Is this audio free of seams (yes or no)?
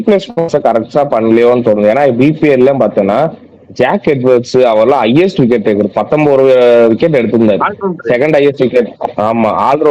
yes